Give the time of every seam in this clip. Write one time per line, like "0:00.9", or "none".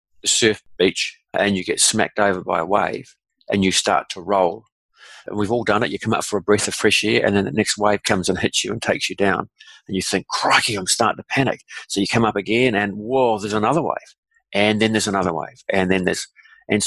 0:05.3